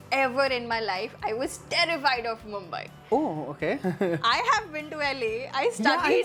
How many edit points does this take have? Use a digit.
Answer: 0